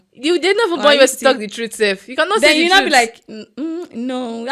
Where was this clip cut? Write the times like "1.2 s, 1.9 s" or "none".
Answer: none